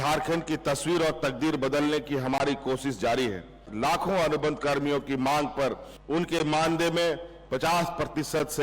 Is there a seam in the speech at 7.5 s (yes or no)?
no